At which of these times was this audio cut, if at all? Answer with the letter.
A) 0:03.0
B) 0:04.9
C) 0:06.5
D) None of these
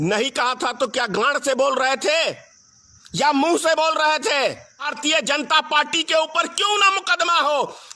B